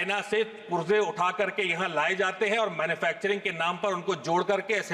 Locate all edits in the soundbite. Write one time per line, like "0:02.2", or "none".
none